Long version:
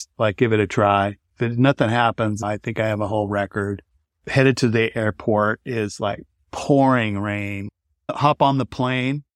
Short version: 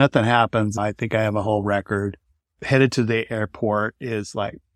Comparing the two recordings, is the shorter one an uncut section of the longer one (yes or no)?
yes